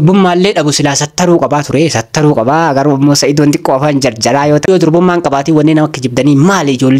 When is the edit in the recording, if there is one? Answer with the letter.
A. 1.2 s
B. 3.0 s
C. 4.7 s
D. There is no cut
C